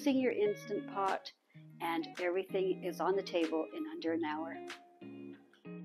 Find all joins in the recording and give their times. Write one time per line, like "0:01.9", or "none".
0:04.9